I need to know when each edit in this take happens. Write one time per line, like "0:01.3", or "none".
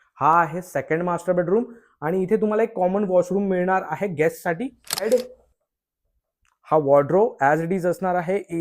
0:05.0